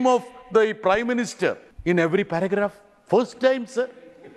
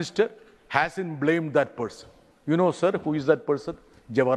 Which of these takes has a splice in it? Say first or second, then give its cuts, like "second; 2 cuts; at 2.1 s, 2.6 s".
first; 1 cut; at 1.7 s